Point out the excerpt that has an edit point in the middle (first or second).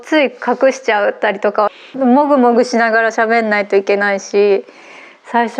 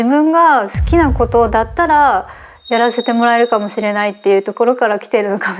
first